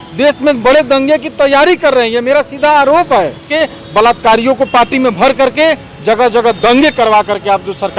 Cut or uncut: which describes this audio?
cut